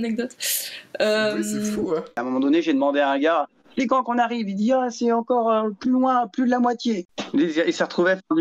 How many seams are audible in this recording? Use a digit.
2